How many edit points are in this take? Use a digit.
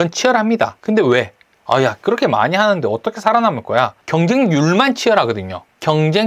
1